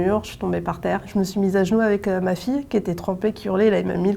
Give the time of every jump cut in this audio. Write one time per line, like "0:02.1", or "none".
0:01.1